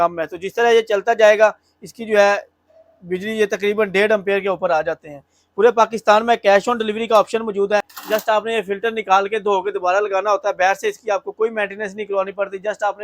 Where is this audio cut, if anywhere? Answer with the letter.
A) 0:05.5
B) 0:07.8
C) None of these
B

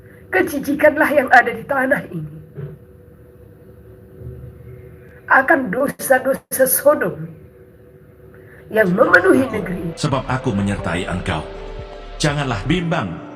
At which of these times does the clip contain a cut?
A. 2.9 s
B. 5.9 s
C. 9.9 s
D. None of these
C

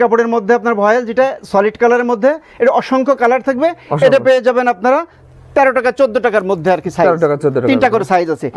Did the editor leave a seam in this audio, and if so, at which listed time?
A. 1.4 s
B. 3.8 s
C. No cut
C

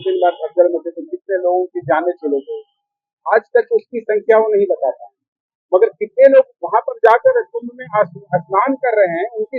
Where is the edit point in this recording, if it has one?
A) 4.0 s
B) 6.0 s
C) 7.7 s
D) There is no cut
D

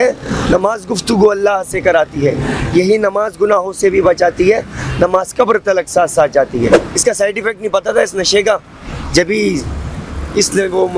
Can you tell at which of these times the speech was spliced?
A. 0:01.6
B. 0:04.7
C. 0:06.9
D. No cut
C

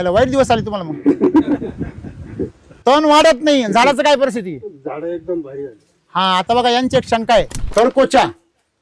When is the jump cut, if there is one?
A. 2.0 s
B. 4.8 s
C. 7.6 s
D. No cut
C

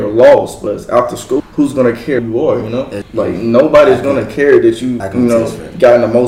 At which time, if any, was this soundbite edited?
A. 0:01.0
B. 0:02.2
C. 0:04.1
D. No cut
B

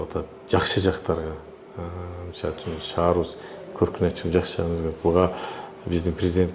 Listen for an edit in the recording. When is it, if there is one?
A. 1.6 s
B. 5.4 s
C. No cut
C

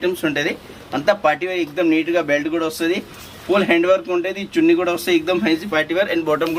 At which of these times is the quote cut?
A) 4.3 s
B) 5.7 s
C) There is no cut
C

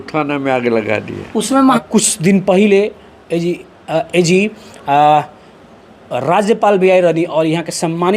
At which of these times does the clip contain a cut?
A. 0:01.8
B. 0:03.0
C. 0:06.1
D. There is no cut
A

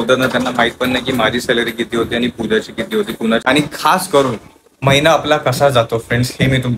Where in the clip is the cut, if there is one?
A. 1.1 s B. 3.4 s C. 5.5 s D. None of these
B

